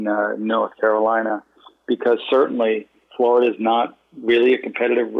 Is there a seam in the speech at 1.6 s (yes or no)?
no